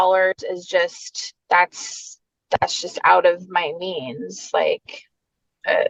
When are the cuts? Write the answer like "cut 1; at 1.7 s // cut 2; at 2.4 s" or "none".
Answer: none